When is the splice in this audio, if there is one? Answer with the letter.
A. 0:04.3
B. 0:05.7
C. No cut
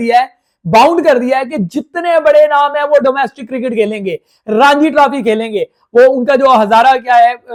C